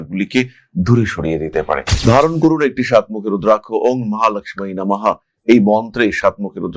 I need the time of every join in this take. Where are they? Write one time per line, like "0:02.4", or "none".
0:02.0